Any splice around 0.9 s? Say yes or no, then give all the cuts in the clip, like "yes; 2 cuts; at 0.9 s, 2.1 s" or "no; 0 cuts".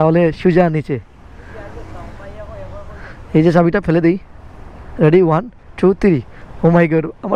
no; 0 cuts